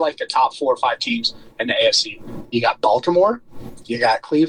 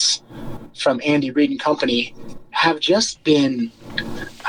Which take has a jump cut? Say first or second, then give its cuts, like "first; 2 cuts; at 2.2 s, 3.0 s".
first; 1 cut; at 2.4 s